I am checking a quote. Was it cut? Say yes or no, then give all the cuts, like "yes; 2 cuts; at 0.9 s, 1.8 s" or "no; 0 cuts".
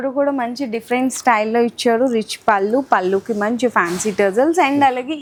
no; 0 cuts